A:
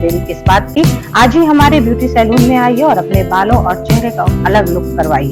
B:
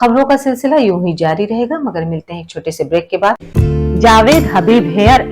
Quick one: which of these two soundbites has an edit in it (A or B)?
B